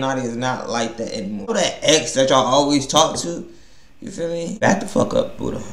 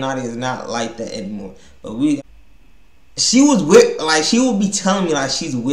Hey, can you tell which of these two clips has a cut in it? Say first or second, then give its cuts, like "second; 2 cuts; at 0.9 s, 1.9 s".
first; 2 cuts; at 1.5 s, 4.6 s